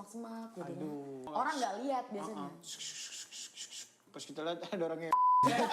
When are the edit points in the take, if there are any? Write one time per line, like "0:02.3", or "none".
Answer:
0:01.3